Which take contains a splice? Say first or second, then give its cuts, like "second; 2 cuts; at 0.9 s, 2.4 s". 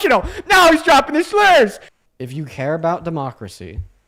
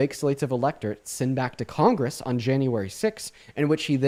first; 1 cut; at 1.9 s